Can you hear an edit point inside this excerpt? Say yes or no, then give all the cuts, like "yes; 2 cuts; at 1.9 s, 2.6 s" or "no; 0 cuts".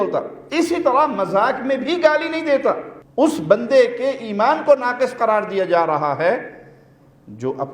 yes; 1 cut; at 3.0 s